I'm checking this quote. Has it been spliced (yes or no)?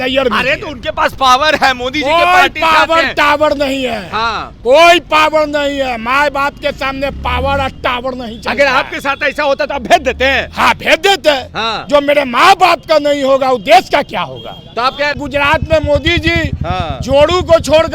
yes